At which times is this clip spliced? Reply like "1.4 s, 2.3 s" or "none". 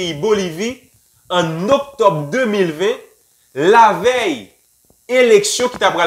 none